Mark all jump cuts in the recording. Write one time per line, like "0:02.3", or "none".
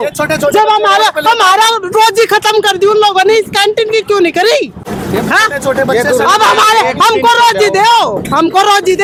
none